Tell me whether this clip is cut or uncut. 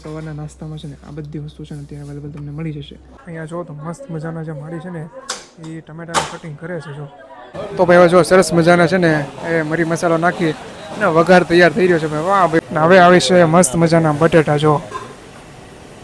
cut